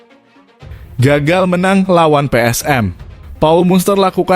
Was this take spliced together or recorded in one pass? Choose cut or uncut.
cut